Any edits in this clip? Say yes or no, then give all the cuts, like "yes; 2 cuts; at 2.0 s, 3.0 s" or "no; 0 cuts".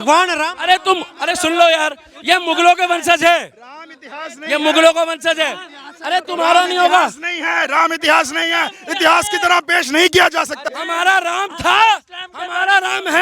yes; 1 cut; at 10.6 s